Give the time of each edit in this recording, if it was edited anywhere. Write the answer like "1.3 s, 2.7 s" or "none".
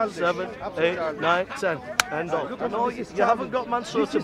2.5 s